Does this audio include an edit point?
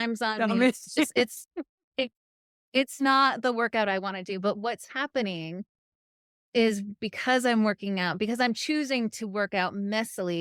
no; 0 cuts

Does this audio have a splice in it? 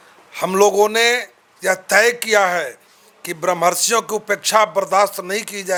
no; 0 cuts

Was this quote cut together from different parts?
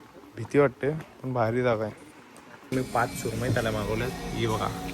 yes; 1 cut; at 2.7 s

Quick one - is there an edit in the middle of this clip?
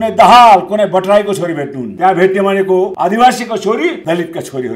yes; 3 cuts; at 1.8 s, 2.9 s, 4.0 s

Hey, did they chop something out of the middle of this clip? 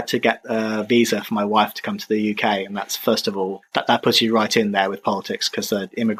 no; 0 cuts

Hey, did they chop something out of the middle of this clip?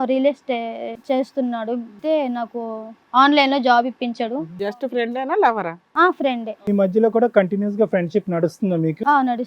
yes; 3 cuts; at 0.9 s, 2.0 s, 4.6 s

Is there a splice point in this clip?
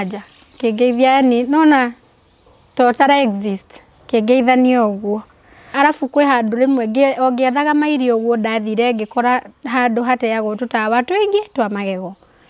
yes; 1 cut; at 5.7 s

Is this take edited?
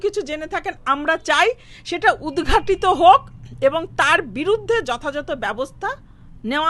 no; 0 cuts

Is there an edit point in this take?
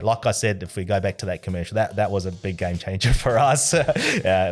no; 0 cuts

